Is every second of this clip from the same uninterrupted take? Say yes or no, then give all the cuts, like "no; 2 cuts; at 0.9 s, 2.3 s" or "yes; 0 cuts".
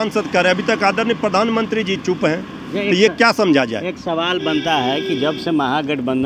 yes; 0 cuts